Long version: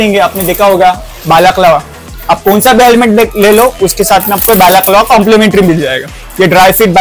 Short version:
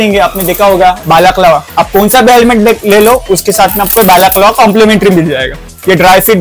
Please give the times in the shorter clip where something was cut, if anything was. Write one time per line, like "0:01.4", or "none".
0:01.0
0:01.7